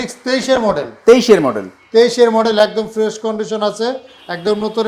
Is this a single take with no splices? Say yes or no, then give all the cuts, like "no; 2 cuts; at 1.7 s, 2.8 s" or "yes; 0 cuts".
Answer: yes; 0 cuts